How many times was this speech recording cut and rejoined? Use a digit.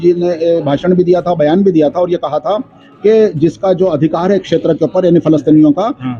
0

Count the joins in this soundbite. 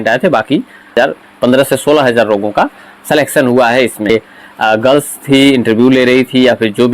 2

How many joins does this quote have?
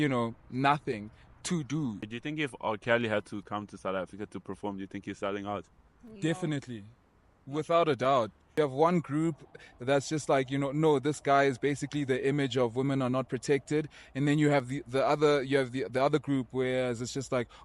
2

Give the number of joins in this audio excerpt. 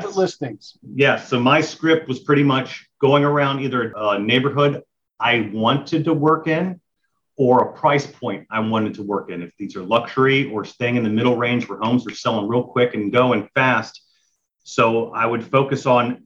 1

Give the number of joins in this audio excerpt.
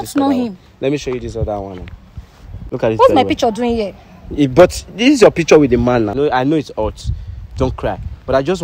2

